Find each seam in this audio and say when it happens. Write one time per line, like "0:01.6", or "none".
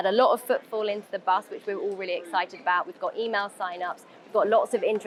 none